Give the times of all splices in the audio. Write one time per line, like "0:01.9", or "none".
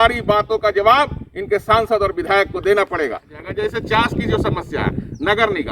0:03.5